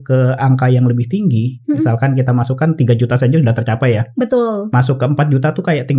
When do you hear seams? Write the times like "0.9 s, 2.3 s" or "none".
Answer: none